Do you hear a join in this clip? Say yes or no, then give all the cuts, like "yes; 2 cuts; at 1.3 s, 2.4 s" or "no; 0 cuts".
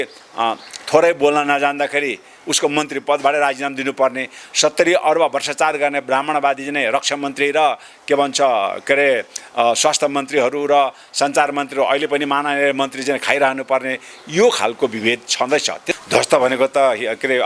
yes; 1 cut; at 15.9 s